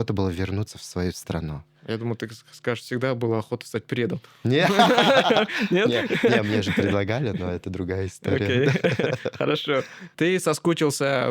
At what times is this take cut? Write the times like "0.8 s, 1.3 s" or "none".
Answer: none